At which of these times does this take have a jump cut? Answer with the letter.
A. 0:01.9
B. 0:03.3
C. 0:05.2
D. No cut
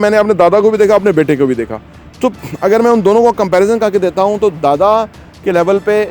D